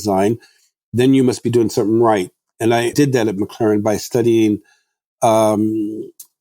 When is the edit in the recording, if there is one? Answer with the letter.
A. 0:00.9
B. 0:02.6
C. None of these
B